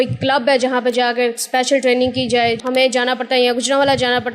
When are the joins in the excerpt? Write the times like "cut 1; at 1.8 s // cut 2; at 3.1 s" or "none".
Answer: cut 1; at 2.6 s